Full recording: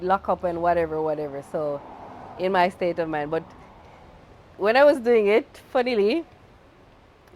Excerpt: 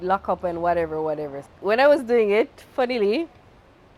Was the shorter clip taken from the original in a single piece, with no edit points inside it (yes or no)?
no